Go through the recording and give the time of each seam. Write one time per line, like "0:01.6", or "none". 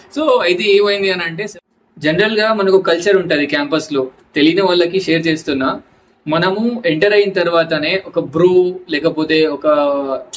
0:01.5